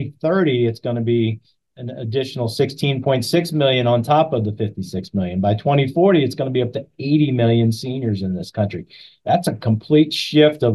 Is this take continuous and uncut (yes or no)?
yes